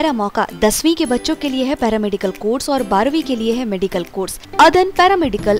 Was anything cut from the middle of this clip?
yes; 1 cut; at 4.4 s

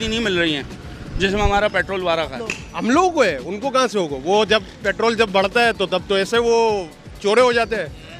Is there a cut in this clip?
yes; 1 cut; at 2.6 s

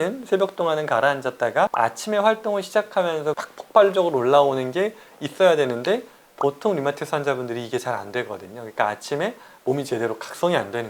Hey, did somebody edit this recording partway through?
yes; 1 cut; at 3.4 s

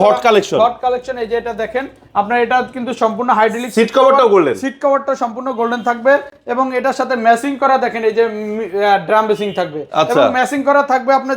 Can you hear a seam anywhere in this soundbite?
no; 0 cuts

